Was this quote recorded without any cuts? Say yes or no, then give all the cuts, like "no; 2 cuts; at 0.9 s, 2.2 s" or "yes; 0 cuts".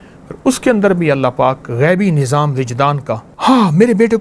no; 1 cut; at 3.3 s